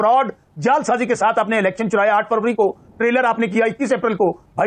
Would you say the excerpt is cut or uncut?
uncut